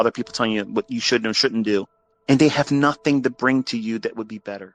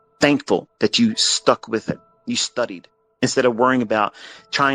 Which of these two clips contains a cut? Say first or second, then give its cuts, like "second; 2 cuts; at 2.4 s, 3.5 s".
second; 2 cuts; at 2.1 s, 3.2 s